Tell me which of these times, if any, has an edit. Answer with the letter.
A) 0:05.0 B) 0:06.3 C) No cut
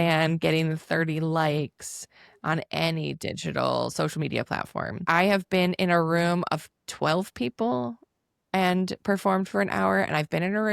A